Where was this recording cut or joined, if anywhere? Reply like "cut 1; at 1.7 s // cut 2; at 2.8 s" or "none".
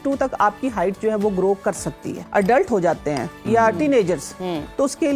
cut 1; at 2.2 s